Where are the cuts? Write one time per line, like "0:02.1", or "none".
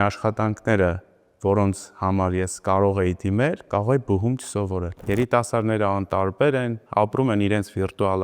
0:04.9